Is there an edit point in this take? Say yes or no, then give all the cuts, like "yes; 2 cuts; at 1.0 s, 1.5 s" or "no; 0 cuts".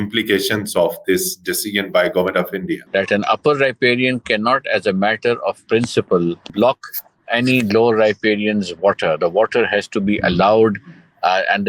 yes; 2 cuts; at 2.8 s, 6.5 s